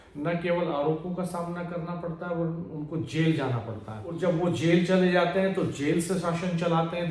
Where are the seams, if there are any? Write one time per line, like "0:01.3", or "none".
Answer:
0:04.0